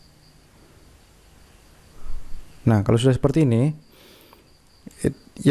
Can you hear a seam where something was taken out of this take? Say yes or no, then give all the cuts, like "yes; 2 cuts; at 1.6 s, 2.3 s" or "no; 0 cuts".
no; 0 cuts